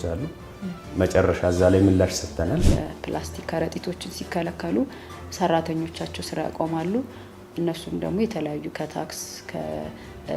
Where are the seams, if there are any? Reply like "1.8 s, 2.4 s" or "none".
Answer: 2.7 s